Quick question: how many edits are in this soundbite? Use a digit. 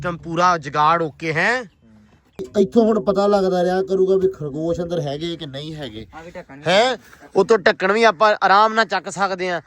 1